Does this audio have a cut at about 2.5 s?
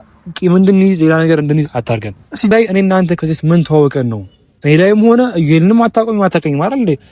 yes; 1 cut; at 2.5 s

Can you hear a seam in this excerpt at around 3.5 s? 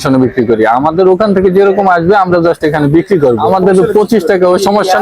yes; 1 cut; at 3.5 s

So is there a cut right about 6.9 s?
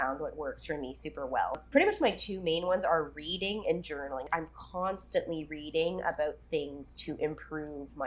no; 2 cuts; at 1.5 s, 4.3 s

